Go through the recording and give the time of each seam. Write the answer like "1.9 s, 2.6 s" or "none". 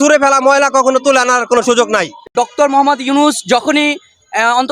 2.2 s